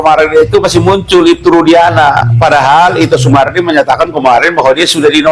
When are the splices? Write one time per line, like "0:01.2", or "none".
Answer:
none